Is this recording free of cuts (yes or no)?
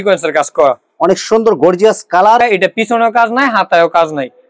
no